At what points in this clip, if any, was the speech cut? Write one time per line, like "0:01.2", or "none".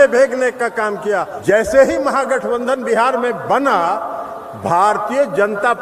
0:01.3